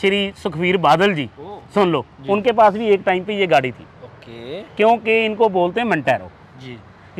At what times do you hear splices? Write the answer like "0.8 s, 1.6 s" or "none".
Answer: none